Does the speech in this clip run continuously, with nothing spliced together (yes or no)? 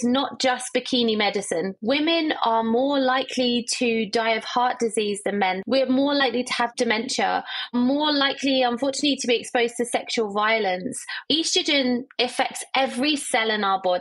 no